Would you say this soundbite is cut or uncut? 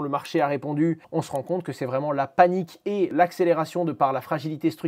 cut